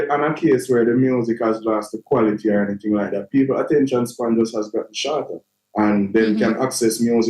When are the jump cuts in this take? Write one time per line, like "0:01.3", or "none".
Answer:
none